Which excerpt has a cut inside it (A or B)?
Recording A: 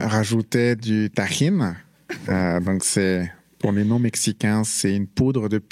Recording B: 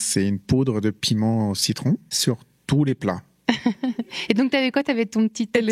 B